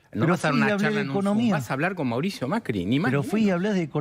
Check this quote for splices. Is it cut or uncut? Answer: uncut